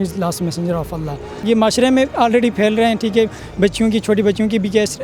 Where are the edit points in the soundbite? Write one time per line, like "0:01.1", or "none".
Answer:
0:01.4